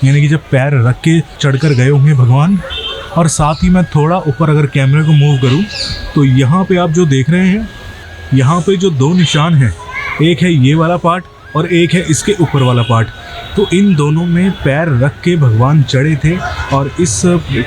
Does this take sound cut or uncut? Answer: cut